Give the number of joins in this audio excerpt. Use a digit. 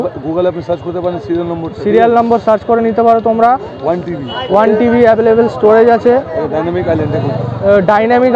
0